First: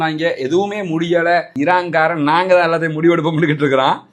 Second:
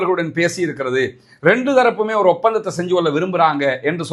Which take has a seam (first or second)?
first